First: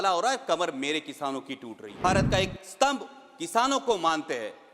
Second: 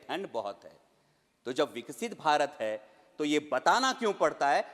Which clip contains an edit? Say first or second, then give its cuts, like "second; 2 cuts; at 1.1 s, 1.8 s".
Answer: first; 1 cut; at 2.0 s